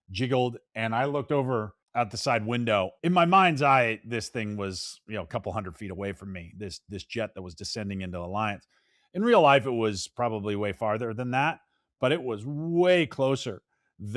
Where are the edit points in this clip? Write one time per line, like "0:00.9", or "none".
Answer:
0:01.8
0:02.9